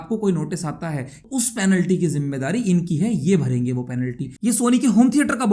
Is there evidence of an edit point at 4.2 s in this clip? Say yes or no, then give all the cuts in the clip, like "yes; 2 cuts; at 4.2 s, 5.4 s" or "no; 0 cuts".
yes; 2 cuts; at 1.1 s, 4.2 s